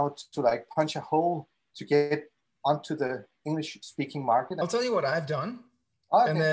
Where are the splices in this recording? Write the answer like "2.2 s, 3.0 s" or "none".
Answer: 4.6 s